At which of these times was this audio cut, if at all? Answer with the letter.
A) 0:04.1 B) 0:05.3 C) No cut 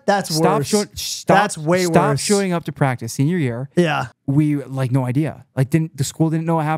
A